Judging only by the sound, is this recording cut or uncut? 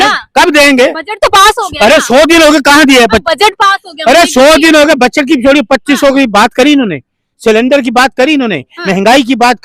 uncut